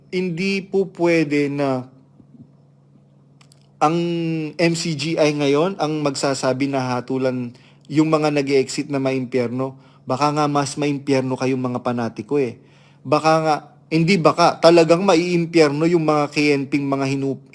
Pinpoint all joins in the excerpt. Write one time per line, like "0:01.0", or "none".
none